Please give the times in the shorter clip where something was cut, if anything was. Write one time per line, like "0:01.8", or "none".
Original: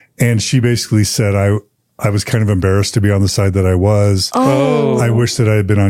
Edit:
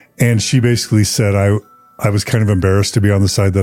none